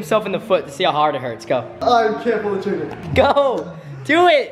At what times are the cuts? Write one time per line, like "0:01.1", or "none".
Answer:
0:01.7
0:03.0